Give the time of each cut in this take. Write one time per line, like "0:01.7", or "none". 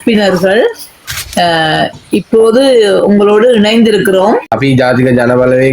0:04.5